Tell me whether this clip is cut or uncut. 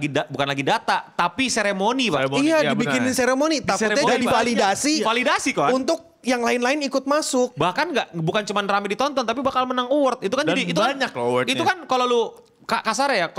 uncut